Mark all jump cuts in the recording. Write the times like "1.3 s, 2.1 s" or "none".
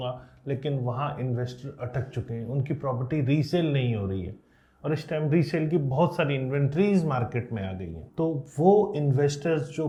none